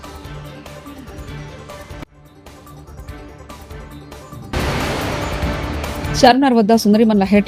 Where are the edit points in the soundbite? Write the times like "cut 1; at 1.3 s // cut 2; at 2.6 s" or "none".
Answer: cut 1; at 6.1 s